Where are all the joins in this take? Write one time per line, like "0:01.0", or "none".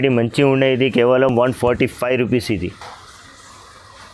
none